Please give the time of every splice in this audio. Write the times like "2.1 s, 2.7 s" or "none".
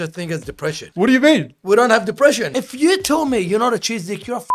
0.8 s, 2.5 s